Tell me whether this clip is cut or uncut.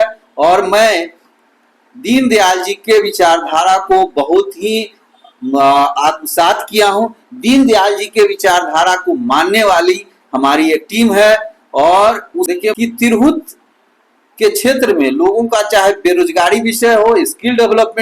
cut